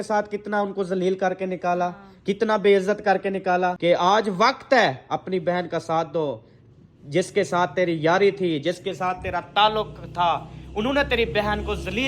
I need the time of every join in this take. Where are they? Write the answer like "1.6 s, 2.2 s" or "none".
3.8 s